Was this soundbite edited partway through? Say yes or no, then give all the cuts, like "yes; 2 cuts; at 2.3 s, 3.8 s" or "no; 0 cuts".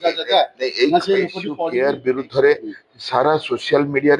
yes; 1 cut; at 1.5 s